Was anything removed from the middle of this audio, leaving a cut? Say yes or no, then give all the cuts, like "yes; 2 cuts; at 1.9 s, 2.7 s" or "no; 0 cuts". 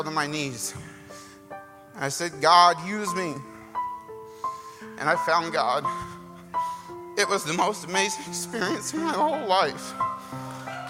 no; 0 cuts